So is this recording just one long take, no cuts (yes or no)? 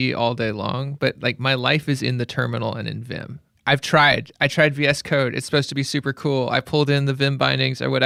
yes